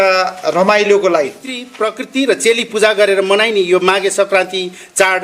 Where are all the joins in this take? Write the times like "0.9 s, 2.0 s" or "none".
1.6 s